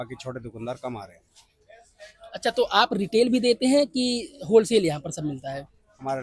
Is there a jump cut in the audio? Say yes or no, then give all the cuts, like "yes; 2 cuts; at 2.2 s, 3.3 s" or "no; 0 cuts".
no; 0 cuts